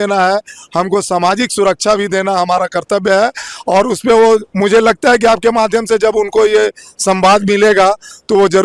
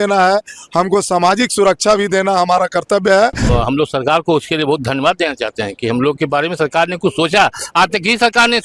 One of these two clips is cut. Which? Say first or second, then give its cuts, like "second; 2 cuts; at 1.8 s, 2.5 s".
second; 1 cut; at 3.4 s